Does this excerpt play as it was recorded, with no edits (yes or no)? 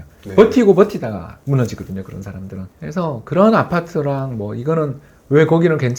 no